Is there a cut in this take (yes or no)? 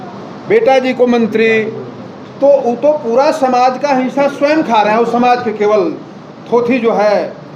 no